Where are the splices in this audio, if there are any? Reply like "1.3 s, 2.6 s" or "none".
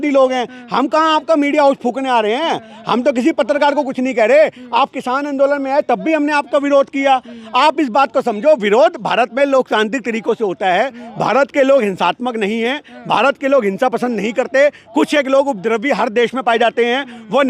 none